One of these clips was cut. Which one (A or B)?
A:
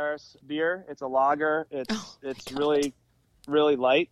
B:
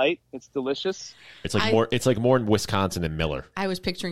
B